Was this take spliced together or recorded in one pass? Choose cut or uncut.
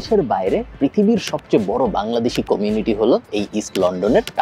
uncut